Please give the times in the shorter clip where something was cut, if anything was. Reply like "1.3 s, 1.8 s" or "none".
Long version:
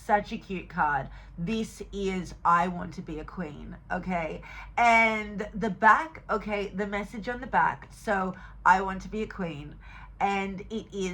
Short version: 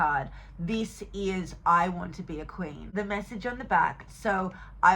2.9 s